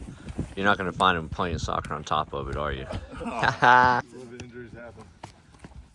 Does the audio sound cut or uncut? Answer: cut